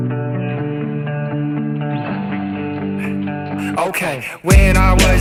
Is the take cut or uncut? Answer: uncut